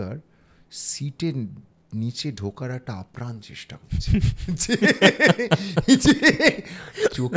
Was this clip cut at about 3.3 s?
no; 0 cuts

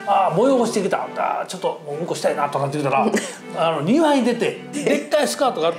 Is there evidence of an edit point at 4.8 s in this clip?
yes; 1 cut; at 4.8 s

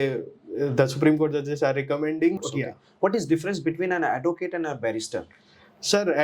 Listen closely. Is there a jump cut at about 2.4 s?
yes; 1 cut; at 2.4 s

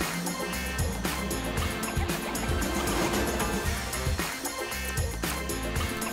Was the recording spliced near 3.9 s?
yes; 1 cut; at 3.9 s

